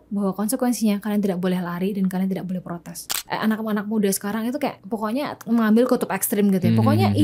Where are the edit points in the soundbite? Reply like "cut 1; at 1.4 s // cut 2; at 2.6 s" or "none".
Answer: cut 1; at 3.0 s // cut 2; at 4.8 s